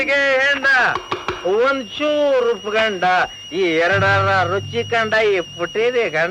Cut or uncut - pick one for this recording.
uncut